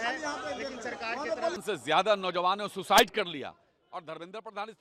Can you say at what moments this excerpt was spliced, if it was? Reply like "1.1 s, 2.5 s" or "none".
2.0 s